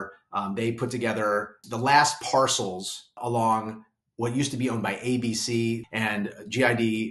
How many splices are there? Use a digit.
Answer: 3